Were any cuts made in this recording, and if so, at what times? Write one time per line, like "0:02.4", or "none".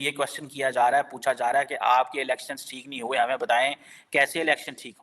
none